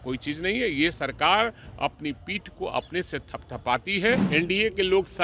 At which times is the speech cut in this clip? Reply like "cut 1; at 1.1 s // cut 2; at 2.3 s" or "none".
cut 1; at 4.2 s